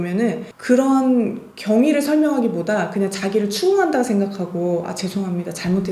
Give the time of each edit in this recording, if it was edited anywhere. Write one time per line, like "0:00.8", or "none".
none